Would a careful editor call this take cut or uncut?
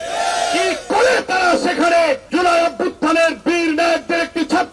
cut